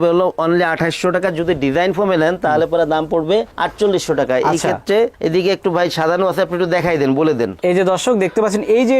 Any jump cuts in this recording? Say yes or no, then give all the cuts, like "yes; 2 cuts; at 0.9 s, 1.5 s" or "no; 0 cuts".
no; 0 cuts